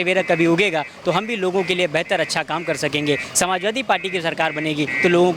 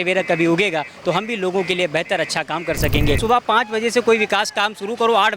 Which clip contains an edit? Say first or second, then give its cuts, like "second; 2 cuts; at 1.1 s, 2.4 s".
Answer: second; 1 cut; at 3.2 s